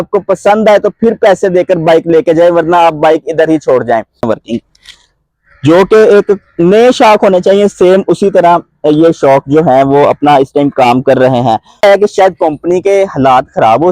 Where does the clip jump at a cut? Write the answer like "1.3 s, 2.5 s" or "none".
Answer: 4.2 s, 11.8 s